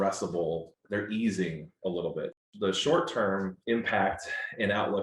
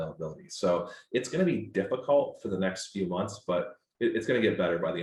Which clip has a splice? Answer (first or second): first